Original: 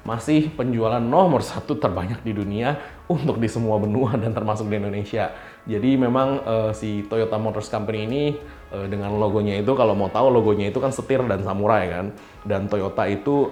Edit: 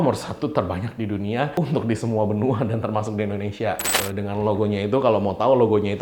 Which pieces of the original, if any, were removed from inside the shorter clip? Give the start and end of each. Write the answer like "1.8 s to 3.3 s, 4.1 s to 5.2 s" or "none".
2.8 s to 3.0 s, 5.5 s to 8.7 s